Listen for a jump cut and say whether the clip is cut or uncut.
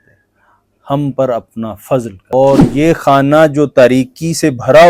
cut